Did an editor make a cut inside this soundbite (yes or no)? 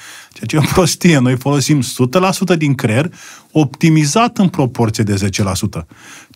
no